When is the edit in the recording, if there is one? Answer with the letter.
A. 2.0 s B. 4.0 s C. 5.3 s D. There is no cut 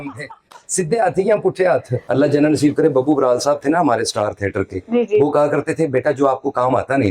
A